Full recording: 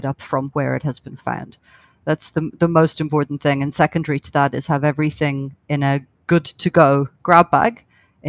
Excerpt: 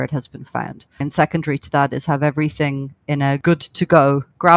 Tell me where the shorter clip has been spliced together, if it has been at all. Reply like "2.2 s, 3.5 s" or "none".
1.0 s, 3.4 s